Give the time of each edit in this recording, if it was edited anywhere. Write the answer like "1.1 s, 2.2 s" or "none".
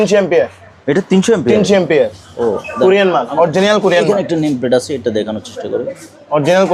none